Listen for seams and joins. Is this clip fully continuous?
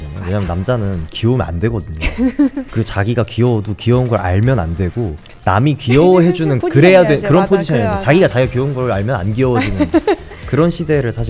no; 2 cuts; at 2.7 s, 6.6 s

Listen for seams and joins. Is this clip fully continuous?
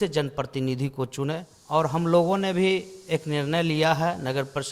no; 1 cut; at 1.6 s

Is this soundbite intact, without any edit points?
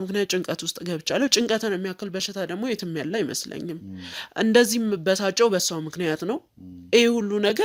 yes; 0 cuts

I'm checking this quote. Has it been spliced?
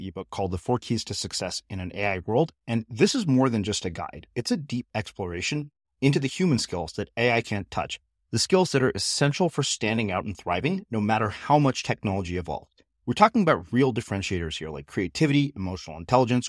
no; 0 cuts

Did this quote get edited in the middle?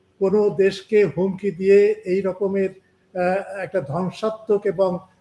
no; 0 cuts

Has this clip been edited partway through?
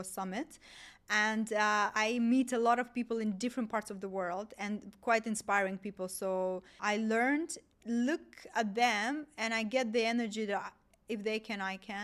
yes; 2 cuts; at 6.8 s, 7.7 s

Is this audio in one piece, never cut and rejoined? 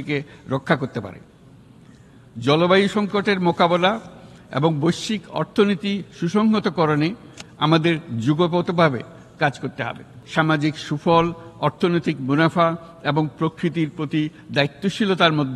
no; 1 cut; at 10.1 s

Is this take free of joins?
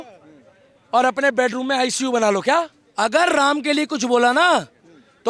no; 1 cut; at 2.8 s

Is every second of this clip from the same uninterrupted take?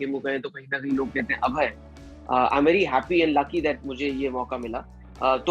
yes; 0 cuts

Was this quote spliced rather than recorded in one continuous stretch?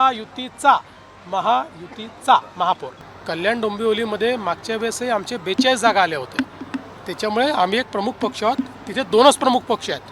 yes; 1 cut; at 2.9 s

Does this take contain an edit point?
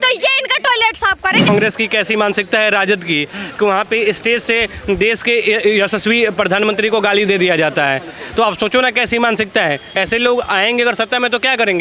yes; 1 cut; at 1.5 s

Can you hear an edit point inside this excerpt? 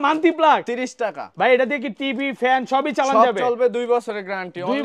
no; 0 cuts

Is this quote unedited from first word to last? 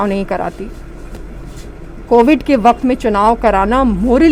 yes; 0 cuts

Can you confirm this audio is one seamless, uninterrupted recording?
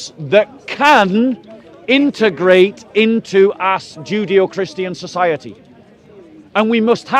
yes; 0 cuts

